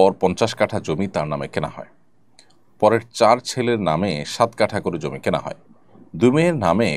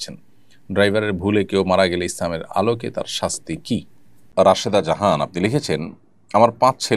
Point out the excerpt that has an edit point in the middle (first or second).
second